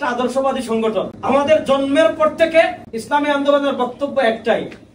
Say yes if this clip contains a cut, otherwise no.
yes